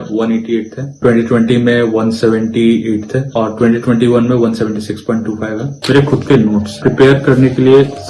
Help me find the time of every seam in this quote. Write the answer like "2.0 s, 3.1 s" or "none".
1.0 s, 5.7 s, 6.8 s